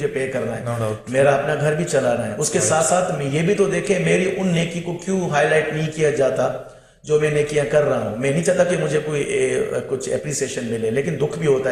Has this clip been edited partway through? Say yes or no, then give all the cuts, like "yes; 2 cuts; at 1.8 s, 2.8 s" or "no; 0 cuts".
no; 0 cuts